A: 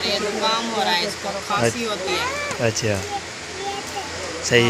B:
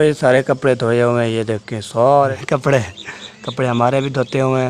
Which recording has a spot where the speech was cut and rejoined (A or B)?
B